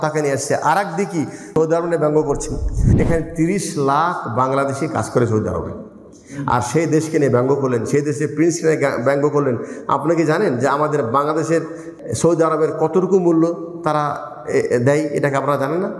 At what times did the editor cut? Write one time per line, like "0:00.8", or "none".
0:01.5
0:02.8
0:11.8